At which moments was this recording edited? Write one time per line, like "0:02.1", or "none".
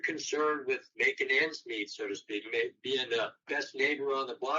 0:00.9
0:03.4